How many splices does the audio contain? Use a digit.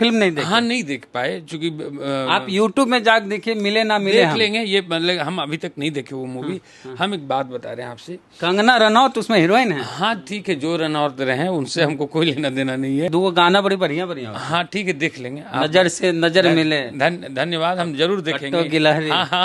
1